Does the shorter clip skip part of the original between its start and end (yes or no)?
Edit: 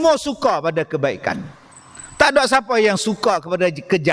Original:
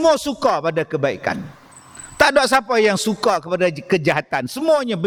no